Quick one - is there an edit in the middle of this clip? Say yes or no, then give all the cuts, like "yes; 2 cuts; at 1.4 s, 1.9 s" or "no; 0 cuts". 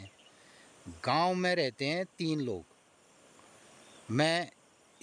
no; 0 cuts